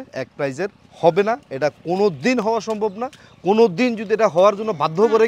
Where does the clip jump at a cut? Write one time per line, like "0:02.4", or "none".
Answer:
none